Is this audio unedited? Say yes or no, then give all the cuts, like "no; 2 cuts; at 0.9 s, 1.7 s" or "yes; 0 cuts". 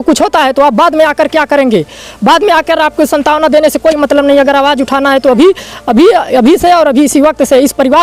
yes; 0 cuts